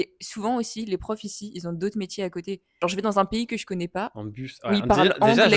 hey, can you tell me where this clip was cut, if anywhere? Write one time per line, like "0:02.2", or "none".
0:02.7